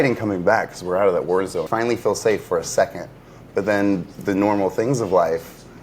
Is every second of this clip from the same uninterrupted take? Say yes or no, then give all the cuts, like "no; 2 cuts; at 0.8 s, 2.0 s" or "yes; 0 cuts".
no; 1 cut; at 1.7 s